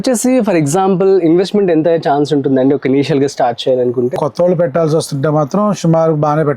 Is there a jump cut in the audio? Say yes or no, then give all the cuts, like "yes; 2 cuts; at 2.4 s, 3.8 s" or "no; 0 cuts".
yes; 1 cut; at 4.2 s